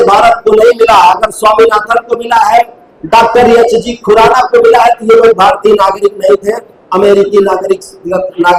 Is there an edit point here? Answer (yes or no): no